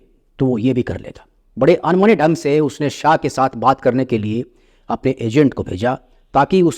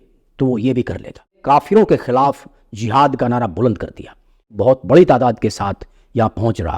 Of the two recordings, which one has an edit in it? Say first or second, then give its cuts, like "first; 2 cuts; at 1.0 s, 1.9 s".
second; 2 cuts; at 1.4 s, 4.5 s